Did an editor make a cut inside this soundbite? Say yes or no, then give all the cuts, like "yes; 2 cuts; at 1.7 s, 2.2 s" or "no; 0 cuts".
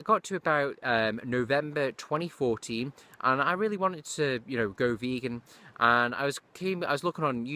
yes; 1 cut; at 3.0 s